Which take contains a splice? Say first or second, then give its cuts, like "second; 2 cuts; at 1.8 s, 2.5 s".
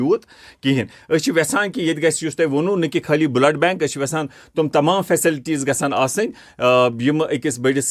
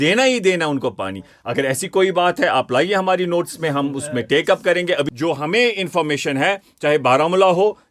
second; 1 cut; at 5.1 s